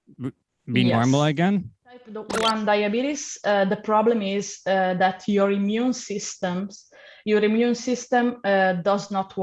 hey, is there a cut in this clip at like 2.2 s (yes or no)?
yes